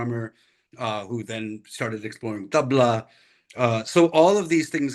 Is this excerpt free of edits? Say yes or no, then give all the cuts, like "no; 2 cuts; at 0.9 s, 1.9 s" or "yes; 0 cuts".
yes; 0 cuts